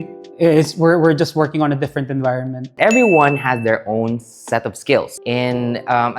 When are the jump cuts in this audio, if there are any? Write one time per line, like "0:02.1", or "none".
0:02.7
0:05.2